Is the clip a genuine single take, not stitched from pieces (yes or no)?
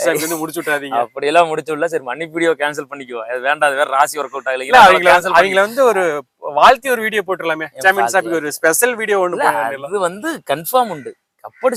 yes